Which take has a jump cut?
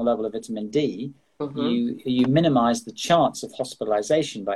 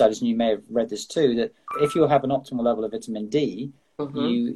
second; 1 cut; at 1.6 s

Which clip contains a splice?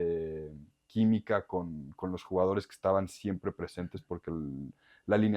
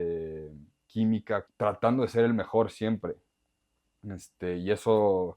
second; 1 cut; at 1.5 s

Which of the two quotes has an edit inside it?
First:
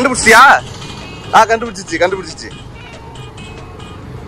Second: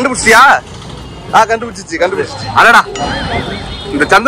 second; 1 cut; at 2.4 s

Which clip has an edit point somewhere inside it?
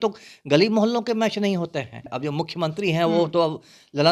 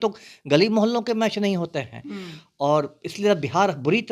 first; 1 cut; at 2.0 s

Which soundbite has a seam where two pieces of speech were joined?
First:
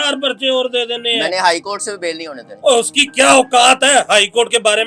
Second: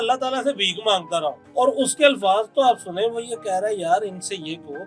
second; 1 cut; at 1.4 s

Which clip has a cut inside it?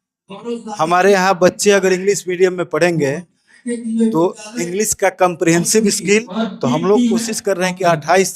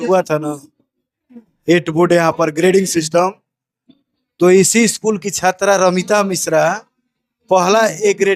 first; 1 cut; at 6.3 s

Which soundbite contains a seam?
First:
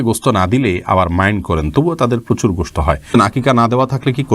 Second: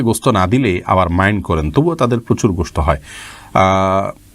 first; 1 cut; at 3.1 s

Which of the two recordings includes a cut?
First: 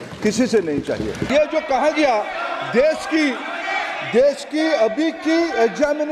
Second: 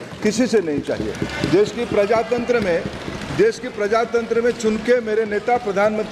first; 1 cut; at 1.2 s

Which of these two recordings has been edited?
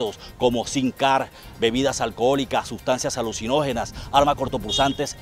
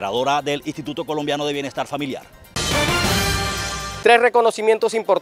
second; 2 cuts; at 2.5 s, 3.8 s

